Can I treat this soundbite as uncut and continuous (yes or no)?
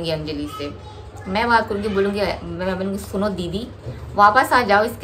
yes